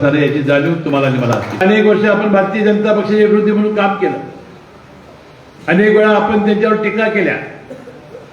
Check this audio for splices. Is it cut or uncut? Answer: cut